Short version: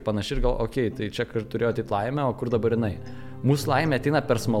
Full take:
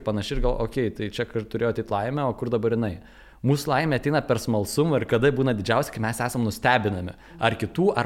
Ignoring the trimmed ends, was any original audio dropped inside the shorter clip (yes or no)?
no